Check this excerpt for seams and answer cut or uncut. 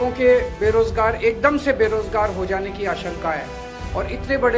uncut